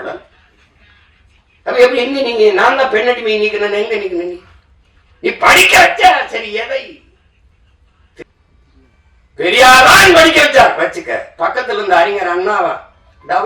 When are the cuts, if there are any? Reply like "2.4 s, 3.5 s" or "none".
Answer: 8.2 s